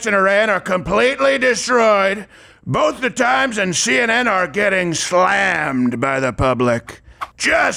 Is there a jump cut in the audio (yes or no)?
no